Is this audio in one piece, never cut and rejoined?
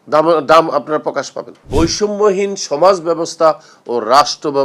no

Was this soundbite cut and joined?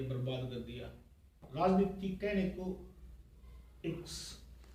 yes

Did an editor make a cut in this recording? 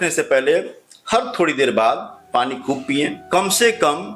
yes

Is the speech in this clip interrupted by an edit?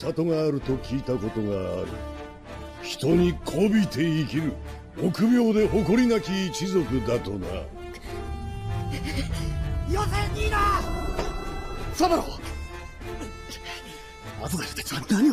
yes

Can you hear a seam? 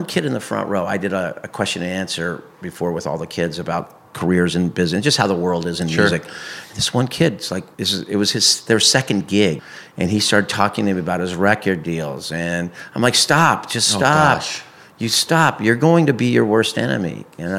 yes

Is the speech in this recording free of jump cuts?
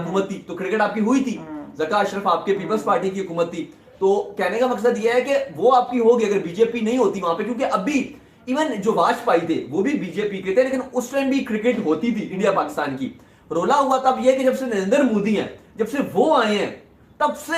yes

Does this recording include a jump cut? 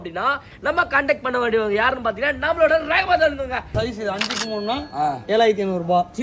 yes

